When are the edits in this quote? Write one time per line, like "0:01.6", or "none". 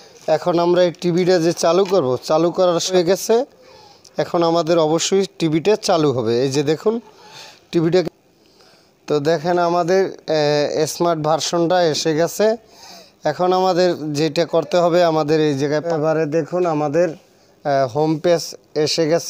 0:02.9
0:08.0
0:15.8